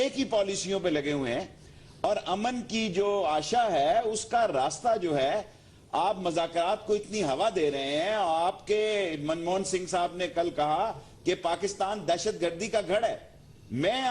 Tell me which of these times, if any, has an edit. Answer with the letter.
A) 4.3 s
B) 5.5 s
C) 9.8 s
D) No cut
A